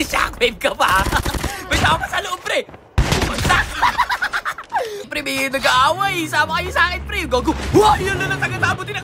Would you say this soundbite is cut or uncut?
cut